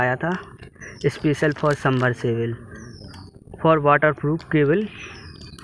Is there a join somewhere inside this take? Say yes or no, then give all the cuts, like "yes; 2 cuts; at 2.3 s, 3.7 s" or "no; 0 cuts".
no; 0 cuts